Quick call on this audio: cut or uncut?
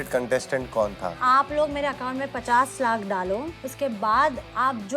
cut